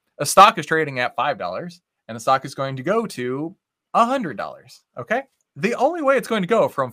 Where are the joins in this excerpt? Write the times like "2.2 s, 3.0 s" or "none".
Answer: 5.4 s